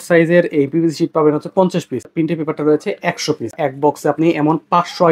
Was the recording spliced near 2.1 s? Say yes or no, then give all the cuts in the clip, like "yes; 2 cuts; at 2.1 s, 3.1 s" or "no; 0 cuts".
yes; 2 cuts; at 2.1 s, 3.6 s